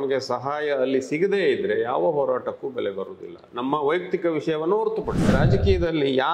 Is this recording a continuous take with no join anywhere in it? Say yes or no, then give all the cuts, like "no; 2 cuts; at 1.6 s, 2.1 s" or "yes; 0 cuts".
no; 1 cut; at 5.3 s